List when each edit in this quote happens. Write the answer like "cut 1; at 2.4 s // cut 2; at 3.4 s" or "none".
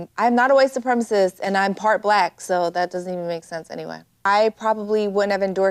cut 1; at 4.2 s